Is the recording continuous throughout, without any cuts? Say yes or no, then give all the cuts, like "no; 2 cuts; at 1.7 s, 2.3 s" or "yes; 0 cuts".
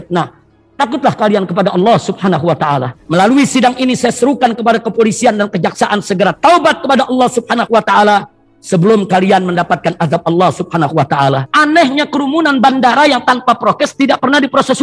no; 2 cuts; at 3.0 s, 11.5 s